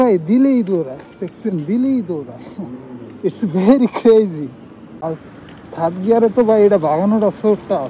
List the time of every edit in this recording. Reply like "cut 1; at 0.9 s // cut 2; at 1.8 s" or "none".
cut 1; at 4.9 s